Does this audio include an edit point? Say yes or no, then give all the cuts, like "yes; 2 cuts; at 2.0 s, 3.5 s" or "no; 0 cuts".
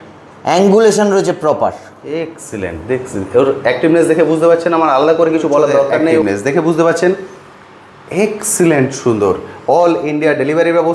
yes; 1 cut; at 6.2 s